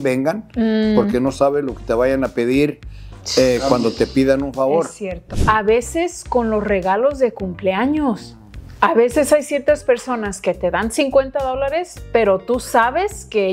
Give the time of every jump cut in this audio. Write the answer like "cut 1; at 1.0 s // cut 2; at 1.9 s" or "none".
cut 1; at 5.3 s